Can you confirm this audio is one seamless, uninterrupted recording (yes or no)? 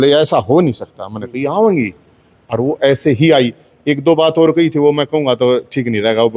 yes